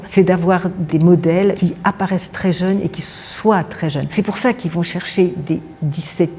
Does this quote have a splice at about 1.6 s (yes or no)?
yes